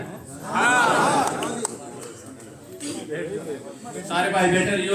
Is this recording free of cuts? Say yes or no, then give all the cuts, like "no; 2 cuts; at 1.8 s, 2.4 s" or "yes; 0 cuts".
yes; 0 cuts